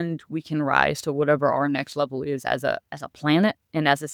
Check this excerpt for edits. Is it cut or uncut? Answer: uncut